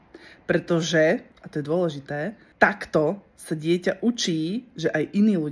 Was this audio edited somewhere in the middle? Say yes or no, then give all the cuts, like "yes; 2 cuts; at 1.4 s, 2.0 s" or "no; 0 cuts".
yes; 2 cuts; at 1.4 s, 2.4 s